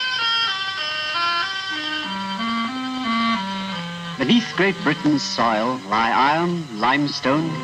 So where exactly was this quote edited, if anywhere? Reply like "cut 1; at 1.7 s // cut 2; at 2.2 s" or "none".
none